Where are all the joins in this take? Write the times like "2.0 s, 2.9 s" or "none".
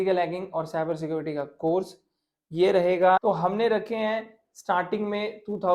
3.2 s